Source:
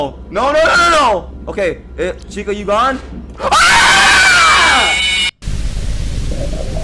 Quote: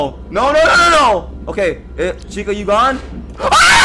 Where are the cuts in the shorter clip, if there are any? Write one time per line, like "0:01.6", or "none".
none